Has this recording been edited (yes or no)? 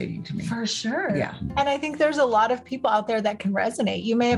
no